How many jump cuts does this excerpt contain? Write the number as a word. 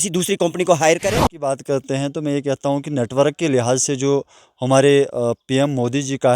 one